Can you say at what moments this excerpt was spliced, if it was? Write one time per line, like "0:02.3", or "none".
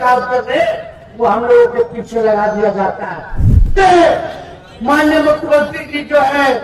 0:03.6